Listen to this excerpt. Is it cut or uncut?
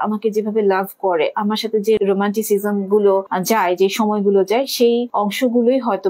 cut